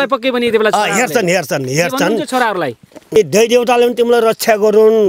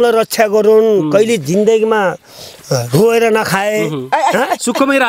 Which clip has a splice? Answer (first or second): first